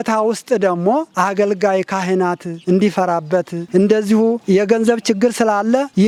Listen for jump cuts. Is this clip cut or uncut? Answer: uncut